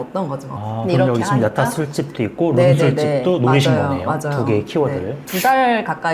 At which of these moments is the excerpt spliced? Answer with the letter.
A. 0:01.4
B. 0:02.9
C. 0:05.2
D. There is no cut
C